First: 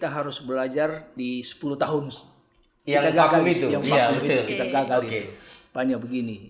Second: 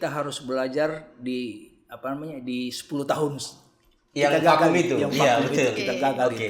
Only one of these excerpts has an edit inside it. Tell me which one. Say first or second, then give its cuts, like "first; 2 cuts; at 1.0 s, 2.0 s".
first; 1 cut; at 1.1 s